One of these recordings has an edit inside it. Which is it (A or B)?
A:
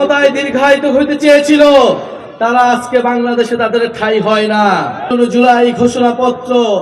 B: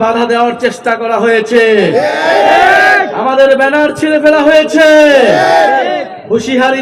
A